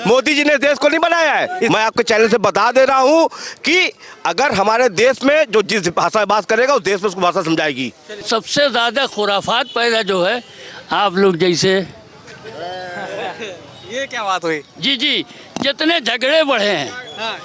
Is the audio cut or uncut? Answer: cut